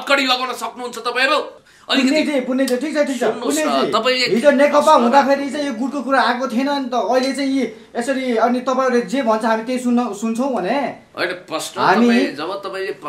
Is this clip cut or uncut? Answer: cut